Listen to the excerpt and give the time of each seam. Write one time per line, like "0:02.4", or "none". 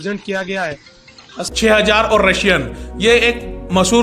0:01.4